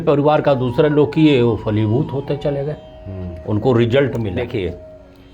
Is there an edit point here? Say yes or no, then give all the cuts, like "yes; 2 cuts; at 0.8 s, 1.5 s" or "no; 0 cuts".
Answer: yes; 1 cut; at 4.3 s